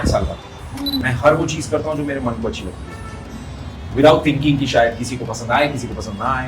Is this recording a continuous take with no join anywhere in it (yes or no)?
no